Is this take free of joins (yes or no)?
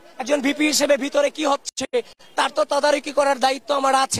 yes